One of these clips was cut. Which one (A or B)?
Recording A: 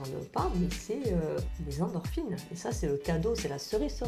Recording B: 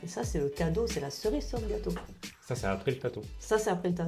A